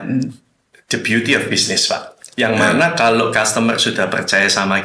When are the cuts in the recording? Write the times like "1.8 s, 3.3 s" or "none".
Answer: none